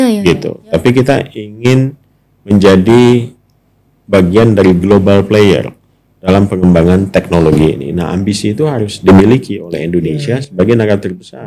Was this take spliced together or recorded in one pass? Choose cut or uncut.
uncut